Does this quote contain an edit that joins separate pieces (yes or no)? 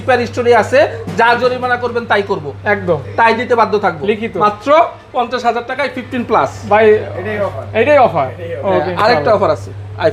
no